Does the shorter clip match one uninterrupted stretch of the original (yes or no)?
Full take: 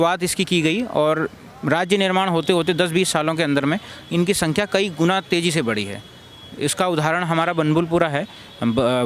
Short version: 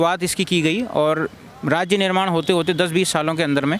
yes